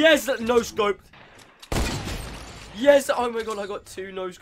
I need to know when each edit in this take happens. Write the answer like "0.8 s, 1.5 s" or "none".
1.1 s